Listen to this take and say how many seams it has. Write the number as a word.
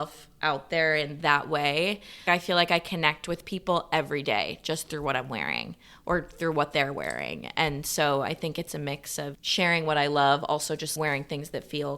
two